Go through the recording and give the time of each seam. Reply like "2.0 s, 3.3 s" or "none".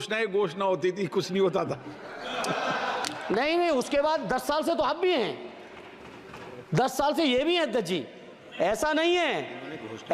none